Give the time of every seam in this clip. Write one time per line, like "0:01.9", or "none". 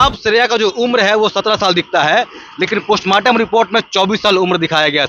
none